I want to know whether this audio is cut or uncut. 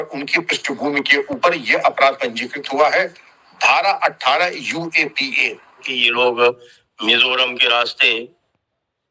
cut